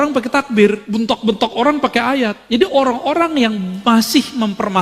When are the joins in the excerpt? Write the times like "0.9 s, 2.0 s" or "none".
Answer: 0.8 s, 2.4 s